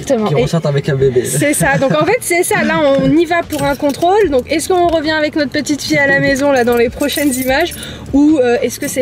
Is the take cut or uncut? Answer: uncut